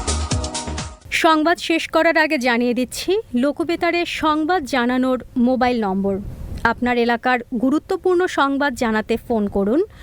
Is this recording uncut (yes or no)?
yes